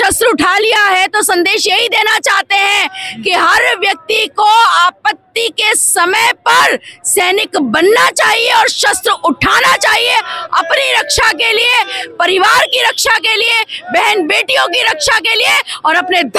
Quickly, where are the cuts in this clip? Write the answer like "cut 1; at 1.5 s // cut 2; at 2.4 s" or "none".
none